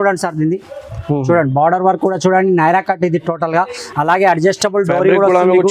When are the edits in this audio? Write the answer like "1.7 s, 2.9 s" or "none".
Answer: none